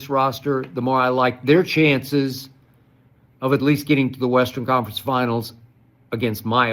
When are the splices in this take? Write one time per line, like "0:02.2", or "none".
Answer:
none